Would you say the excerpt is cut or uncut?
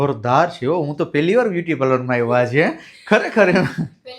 uncut